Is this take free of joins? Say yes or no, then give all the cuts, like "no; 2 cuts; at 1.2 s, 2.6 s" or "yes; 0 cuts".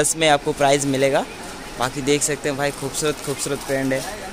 yes; 0 cuts